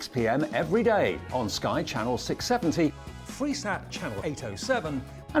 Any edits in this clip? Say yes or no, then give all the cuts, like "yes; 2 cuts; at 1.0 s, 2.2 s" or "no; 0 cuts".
no; 0 cuts